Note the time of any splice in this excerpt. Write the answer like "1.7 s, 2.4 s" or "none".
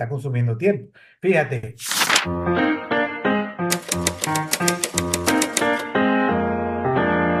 2.2 s